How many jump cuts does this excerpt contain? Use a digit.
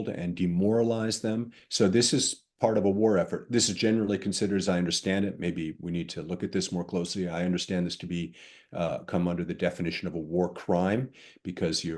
0